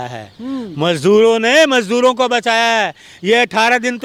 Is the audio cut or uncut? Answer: uncut